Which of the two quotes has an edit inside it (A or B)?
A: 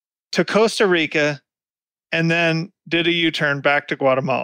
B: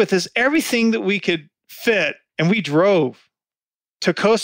B